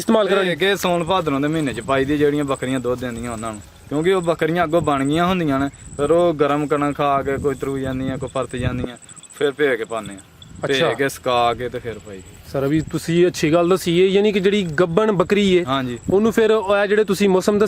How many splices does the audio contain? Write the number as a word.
zero